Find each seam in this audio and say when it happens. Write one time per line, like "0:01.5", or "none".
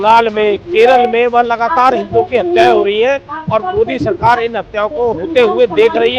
none